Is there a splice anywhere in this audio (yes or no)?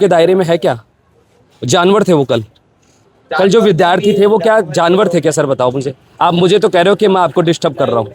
no